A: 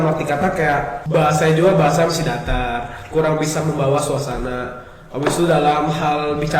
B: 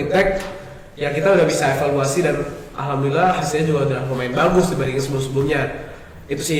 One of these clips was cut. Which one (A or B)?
A